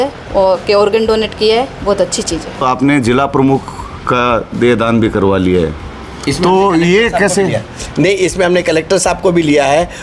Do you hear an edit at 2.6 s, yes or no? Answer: yes